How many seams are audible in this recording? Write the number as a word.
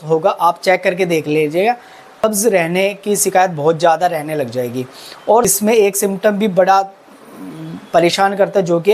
two